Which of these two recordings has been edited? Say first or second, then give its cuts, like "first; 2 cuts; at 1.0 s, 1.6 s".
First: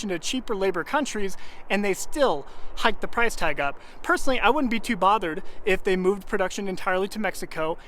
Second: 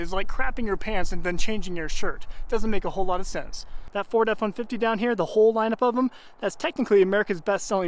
second; 1 cut; at 3.7 s